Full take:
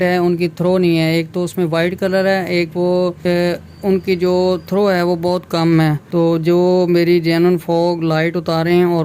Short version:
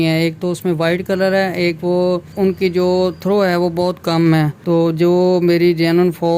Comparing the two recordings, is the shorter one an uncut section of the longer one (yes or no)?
no